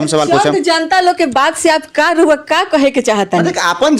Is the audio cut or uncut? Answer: uncut